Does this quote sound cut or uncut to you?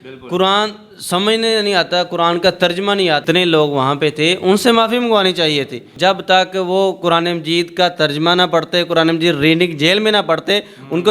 cut